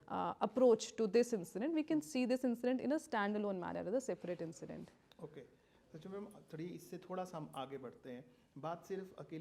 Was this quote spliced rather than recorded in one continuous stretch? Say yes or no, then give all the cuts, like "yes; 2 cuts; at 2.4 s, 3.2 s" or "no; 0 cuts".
no; 0 cuts